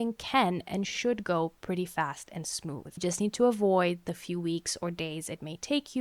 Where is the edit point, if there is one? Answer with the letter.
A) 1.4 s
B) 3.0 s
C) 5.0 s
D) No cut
B